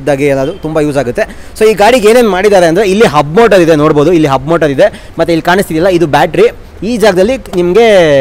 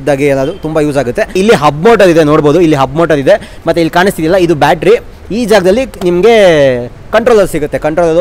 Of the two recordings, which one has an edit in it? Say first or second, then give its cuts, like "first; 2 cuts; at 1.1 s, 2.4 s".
second; 1 cut; at 1.4 s